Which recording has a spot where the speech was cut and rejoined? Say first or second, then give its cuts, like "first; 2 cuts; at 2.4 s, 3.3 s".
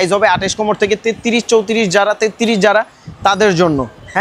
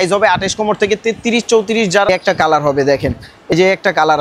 second; 2 cuts; at 2.1 s, 3.5 s